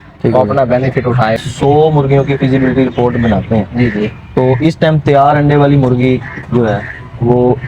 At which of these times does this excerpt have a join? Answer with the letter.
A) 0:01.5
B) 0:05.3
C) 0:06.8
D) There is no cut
A